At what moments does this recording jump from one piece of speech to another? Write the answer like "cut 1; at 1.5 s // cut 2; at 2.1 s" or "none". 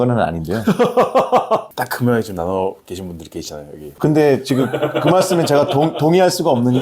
cut 1; at 1.7 s